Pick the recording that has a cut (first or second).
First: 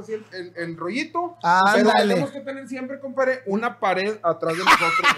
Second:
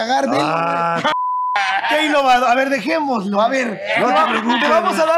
second